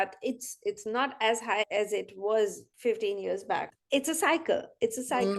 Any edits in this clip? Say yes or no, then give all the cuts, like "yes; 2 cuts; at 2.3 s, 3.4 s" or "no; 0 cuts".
yes; 3 cuts; at 1.7 s, 2.7 s, 3.7 s